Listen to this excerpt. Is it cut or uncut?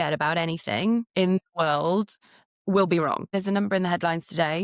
cut